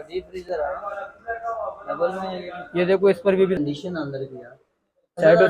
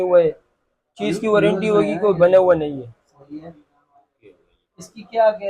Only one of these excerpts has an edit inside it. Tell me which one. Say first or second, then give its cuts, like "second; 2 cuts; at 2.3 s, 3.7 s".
first; 1 cut; at 3.6 s